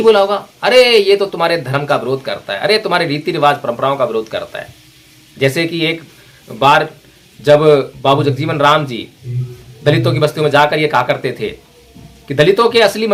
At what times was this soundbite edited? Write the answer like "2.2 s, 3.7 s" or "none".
none